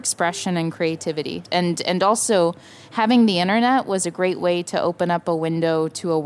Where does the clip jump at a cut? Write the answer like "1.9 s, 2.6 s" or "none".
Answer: 1.4 s